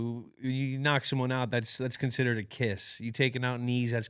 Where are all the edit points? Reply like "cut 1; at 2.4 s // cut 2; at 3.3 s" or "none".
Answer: none